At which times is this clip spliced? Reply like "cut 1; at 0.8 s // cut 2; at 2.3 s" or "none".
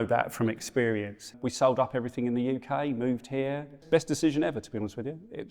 cut 1; at 1.4 s // cut 2; at 3.8 s